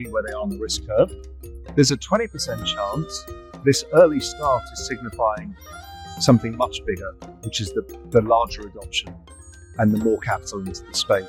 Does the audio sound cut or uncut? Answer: uncut